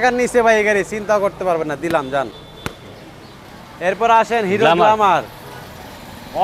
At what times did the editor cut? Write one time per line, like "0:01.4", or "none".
none